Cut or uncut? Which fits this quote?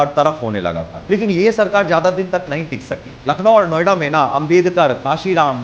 cut